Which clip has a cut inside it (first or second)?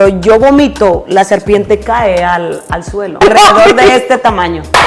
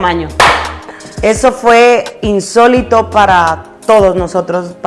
first